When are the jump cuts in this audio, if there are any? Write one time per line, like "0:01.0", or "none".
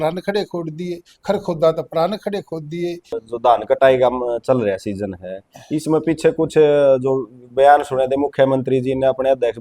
0:03.2